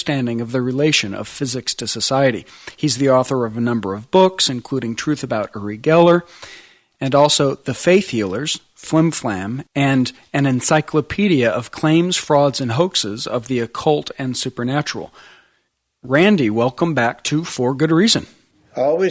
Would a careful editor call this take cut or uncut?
cut